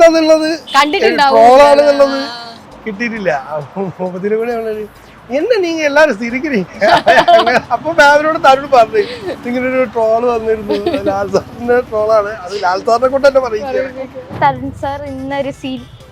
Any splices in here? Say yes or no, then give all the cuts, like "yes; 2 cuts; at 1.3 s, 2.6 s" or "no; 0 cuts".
yes; 1 cut; at 14.2 s